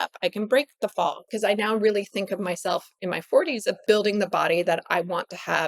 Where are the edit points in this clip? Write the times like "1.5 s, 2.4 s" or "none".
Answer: 1.2 s, 2.9 s, 3.8 s

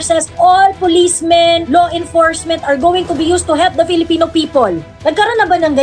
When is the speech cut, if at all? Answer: none

